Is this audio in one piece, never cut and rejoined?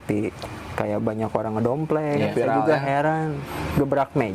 no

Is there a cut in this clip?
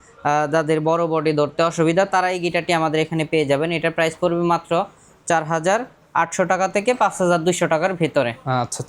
no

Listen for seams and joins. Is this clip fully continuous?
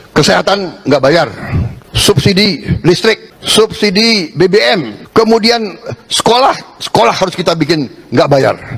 no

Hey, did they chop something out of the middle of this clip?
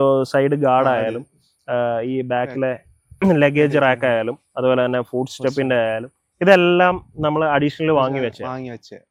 no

